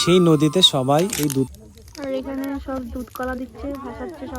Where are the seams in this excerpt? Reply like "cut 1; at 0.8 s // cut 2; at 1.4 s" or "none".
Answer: cut 1; at 1.5 s

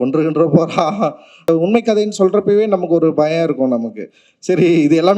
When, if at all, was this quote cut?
cut 1; at 1.4 s

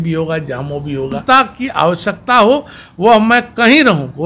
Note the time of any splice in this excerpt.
cut 1; at 1.2 s

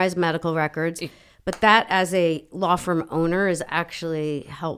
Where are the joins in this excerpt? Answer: none

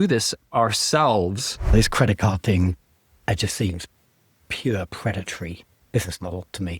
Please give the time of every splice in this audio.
cut 1; at 1.7 s // cut 2; at 5.8 s

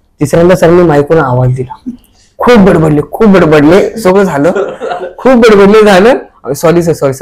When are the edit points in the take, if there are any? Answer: none

